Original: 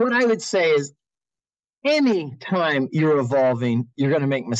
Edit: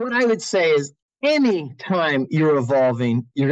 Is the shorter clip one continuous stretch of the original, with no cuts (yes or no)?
no